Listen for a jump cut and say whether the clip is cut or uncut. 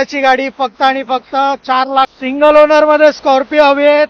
cut